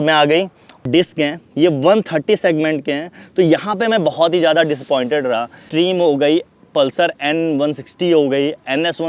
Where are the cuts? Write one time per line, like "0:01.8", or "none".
0:00.8
0:05.6